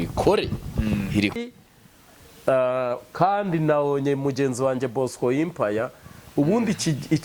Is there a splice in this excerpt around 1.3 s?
yes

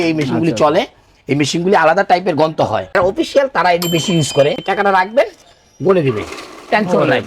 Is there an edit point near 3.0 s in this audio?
yes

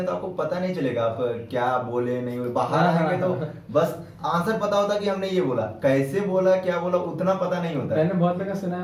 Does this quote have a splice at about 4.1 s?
no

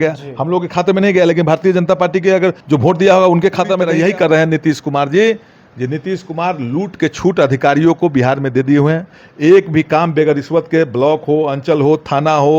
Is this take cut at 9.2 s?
no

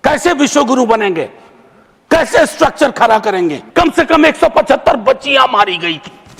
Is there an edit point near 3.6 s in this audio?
yes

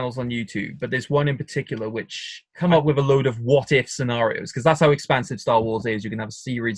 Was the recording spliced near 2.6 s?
yes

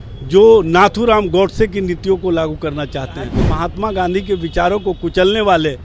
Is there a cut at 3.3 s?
yes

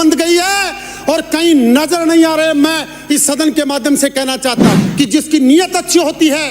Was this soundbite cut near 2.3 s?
no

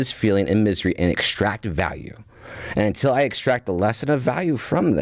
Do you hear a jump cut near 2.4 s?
no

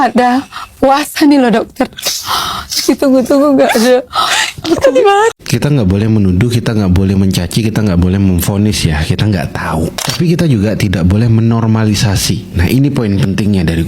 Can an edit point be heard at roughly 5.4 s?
yes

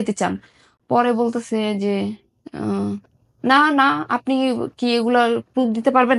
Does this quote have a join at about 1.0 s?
no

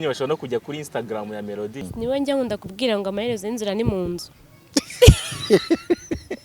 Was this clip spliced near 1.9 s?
yes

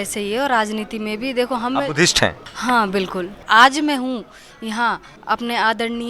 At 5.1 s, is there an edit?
yes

